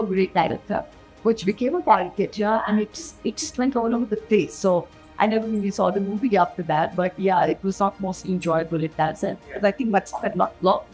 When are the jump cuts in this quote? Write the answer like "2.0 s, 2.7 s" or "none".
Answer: none